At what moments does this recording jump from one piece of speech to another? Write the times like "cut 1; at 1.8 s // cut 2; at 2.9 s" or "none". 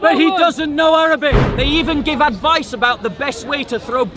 cut 1; at 1.5 s